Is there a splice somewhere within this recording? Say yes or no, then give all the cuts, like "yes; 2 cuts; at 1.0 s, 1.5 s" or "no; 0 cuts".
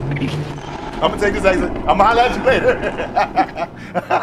no; 0 cuts